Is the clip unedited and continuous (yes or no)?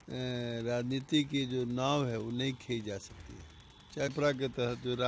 no